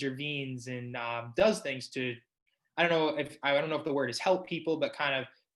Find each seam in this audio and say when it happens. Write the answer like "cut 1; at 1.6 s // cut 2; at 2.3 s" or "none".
none